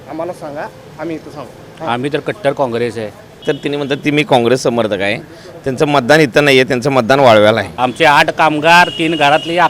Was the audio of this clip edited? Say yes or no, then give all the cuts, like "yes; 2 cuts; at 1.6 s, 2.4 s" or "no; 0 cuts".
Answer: yes; 2 cuts; at 3.4 s, 7.7 s